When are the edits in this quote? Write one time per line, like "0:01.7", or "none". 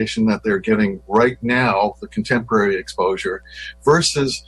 none